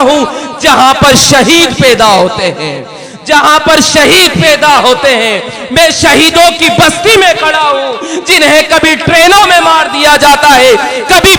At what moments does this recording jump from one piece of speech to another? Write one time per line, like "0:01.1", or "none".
none